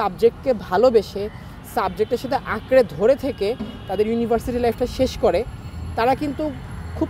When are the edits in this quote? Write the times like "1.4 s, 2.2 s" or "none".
none